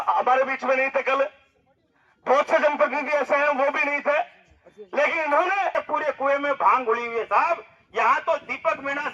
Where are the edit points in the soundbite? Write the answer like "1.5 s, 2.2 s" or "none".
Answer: 5.7 s